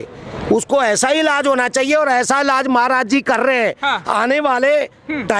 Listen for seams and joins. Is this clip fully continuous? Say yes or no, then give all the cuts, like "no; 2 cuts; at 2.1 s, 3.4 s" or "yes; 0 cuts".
yes; 0 cuts